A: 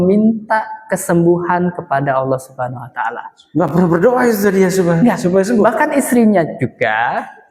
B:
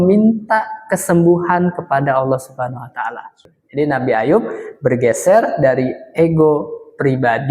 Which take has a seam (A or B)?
B